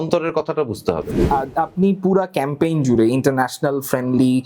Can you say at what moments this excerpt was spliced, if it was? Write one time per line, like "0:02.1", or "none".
0:01.2